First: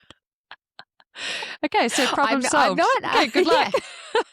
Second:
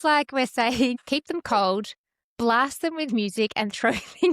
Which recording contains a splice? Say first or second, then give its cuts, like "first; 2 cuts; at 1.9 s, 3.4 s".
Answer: second; 1 cut; at 0.9 s